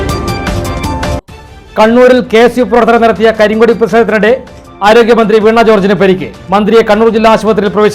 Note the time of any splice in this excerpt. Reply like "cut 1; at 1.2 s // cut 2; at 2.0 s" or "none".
cut 1; at 1.0 s